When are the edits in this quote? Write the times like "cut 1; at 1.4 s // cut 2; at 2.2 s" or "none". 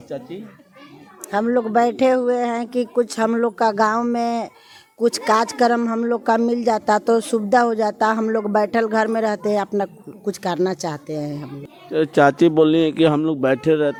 none